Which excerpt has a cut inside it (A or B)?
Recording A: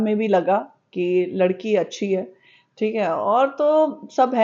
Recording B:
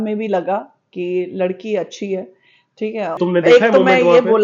B